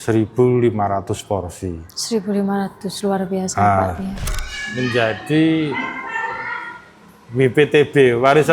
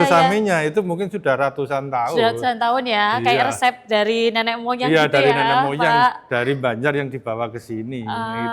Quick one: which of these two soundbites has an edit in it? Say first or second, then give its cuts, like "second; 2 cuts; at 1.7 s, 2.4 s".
first; 1 cut; at 4.2 s